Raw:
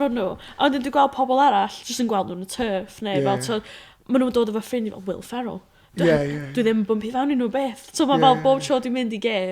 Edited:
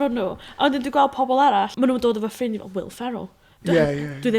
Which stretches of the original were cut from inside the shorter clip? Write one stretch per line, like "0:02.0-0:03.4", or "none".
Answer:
0:01.7-0:04.0